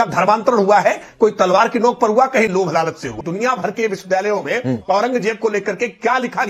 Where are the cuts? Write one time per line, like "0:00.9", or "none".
0:03.1